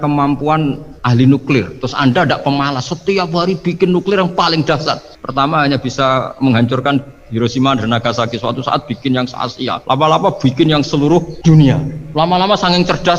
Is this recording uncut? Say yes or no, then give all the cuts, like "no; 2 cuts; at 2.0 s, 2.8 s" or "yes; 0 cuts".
no; 4 cuts; at 0.9 s, 9.8 s, 11.3 s, 12.0 s